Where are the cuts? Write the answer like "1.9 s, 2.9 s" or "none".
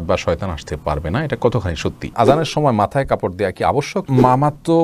2.1 s, 4.0 s